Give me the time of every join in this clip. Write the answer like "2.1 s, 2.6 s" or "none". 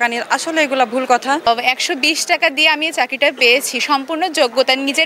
1.5 s